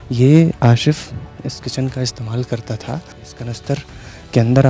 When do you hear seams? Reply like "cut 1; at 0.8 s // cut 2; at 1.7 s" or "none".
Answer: cut 1; at 3.2 s